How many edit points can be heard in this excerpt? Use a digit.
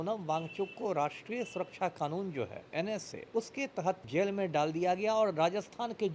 2